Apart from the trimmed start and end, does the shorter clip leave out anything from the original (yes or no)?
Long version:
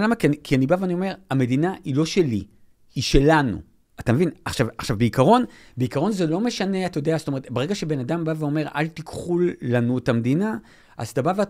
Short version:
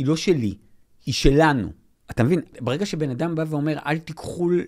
yes